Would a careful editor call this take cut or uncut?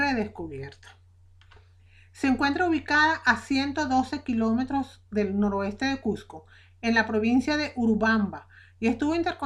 uncut